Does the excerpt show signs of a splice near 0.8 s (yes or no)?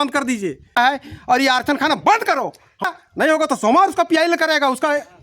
yes